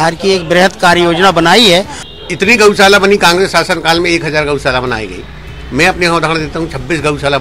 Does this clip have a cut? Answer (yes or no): yes